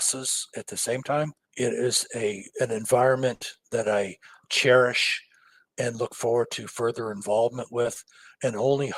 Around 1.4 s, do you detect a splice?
yes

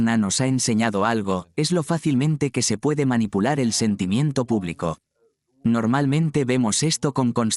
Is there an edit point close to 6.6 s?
no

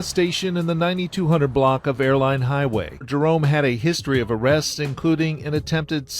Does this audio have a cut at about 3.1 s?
yes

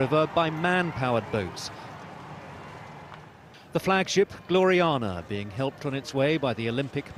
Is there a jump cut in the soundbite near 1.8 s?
no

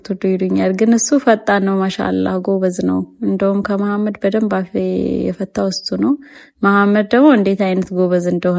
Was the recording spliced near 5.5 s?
no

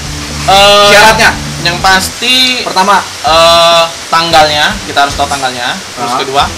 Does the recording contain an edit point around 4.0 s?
yes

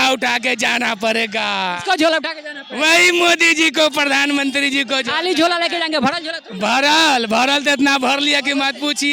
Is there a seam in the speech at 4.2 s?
no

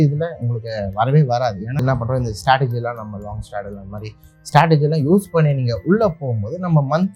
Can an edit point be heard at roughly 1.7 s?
yes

